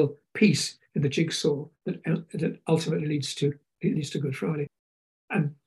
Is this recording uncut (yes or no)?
no